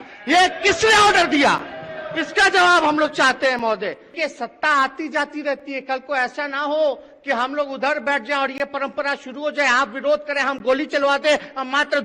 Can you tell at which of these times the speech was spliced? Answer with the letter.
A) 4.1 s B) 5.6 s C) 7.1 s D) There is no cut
A